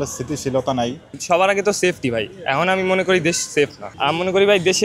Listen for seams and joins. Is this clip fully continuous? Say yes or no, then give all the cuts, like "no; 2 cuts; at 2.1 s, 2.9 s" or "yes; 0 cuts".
no; 2 cuts; at 1.1 s, 3.9 s